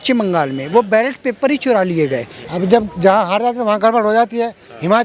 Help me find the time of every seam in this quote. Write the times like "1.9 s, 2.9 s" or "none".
2.4 s

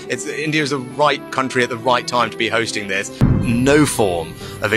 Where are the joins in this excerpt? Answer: 3.4 s

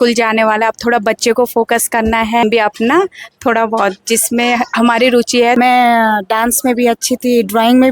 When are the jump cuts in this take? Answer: 2.4 s, 5.6 s

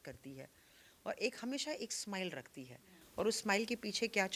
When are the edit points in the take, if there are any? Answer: none

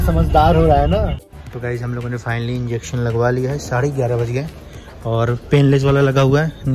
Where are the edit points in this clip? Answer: 1.3 s

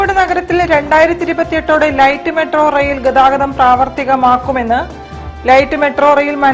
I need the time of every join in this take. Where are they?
none

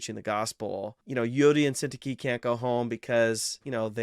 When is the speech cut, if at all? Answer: 1.0 s

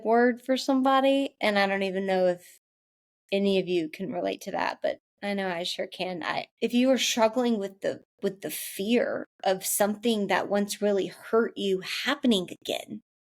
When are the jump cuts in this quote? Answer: 6.5 s

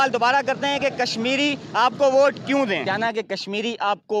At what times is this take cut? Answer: 2.8 s

